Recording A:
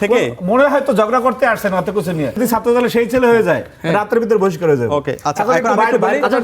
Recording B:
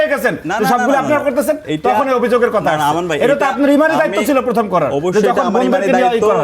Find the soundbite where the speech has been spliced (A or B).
A